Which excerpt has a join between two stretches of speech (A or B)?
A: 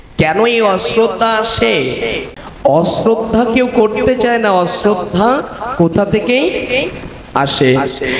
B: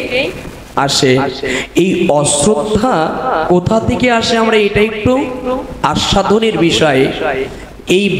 A